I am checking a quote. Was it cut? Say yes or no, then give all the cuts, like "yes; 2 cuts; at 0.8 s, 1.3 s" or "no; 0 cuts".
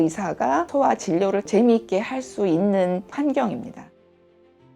yes; 1 cut; at 3.8 s